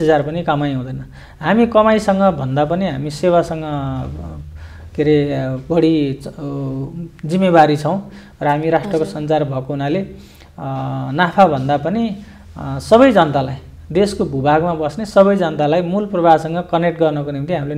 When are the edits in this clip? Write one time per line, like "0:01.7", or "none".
none